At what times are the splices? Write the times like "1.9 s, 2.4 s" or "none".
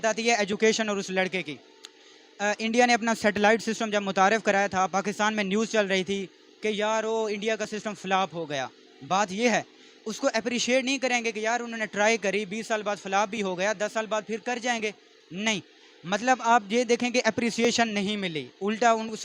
none